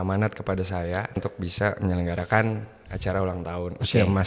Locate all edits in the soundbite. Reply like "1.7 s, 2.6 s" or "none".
1.1 s